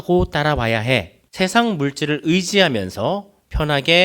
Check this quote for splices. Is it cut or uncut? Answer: cut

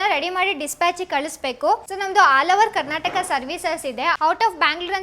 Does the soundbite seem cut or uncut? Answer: uncut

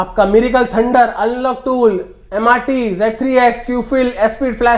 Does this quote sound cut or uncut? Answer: uncut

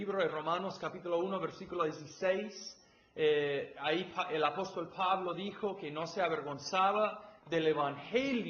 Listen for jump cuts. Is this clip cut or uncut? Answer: uncut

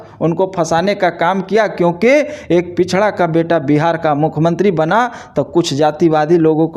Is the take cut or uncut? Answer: uncut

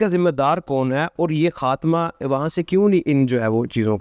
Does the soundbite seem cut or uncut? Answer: uncut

